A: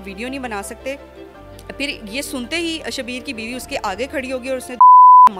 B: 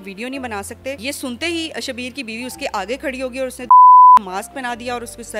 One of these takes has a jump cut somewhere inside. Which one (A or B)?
B